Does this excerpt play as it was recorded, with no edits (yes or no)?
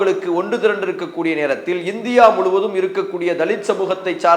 yes